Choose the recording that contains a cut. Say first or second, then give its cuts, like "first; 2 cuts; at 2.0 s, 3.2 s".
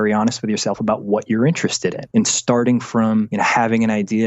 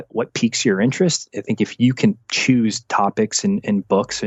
first; 2 cuts; at 2.0 s, 3.3 s